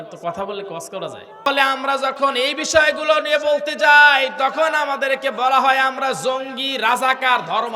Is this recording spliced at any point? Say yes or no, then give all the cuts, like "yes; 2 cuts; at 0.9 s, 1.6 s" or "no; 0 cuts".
yes; 1 cut; at 1.5 s